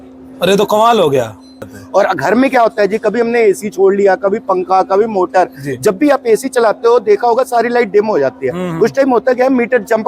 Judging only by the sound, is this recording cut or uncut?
cut